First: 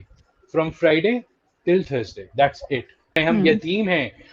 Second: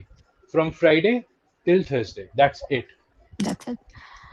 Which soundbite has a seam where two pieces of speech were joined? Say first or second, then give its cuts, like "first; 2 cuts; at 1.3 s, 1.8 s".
first; 1 cut; at 3.2 s